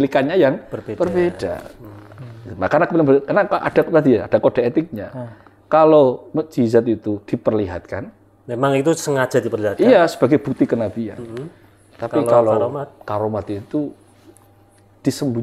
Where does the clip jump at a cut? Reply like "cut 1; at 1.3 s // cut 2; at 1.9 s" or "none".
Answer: none